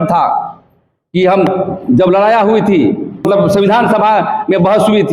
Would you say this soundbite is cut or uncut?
cut